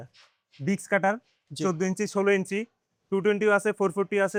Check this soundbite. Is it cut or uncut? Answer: uncut